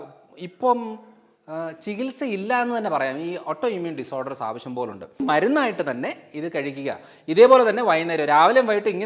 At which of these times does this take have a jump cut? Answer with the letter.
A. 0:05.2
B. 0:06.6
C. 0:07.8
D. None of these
A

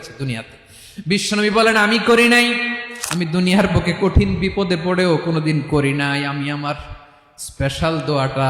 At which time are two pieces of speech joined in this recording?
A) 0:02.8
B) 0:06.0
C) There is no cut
A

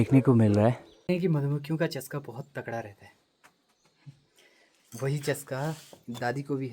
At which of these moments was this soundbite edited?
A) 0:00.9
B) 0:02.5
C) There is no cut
A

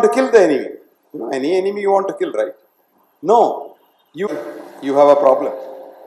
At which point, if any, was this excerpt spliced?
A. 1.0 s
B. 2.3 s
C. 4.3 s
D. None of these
C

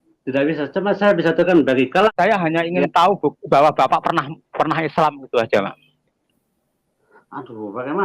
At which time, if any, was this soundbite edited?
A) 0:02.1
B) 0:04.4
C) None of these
A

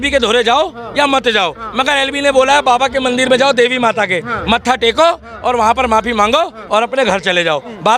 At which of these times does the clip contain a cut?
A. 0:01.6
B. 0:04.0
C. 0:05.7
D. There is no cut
D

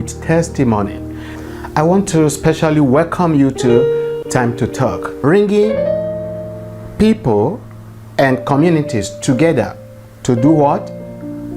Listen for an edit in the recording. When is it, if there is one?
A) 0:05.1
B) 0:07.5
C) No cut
A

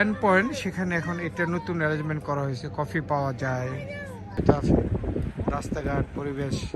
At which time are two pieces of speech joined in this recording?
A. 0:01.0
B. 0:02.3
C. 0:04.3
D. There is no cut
C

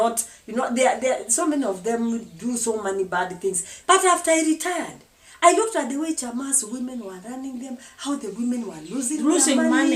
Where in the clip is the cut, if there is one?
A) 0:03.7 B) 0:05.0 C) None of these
A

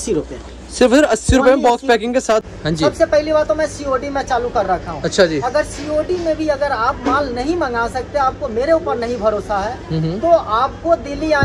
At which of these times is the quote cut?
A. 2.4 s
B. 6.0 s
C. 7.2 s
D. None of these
A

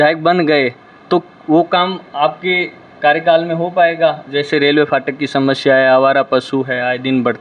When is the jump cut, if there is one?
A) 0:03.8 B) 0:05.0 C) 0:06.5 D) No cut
D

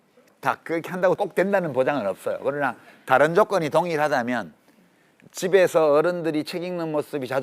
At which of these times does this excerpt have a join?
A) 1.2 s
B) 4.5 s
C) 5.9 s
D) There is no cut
A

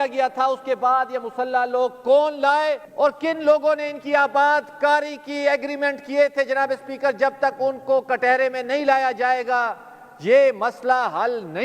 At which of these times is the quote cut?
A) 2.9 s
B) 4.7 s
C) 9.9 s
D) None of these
A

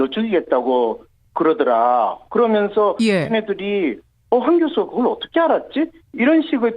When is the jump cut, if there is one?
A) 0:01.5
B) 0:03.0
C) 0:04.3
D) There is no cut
C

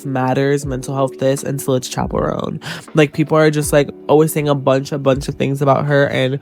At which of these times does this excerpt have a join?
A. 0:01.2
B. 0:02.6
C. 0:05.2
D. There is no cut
D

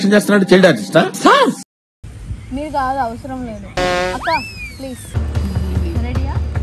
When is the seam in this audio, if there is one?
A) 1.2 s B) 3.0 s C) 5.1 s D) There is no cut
C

